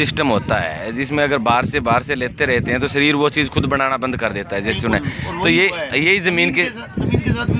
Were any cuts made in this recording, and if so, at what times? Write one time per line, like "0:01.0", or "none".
none

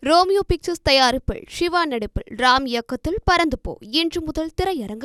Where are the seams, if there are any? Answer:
none

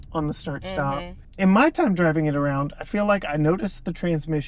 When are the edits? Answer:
0:01.2

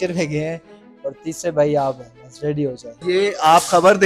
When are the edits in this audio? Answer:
0:03.0

